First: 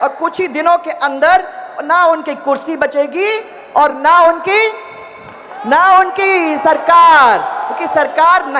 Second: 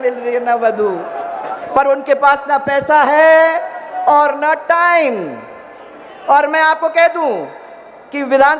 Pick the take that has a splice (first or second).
second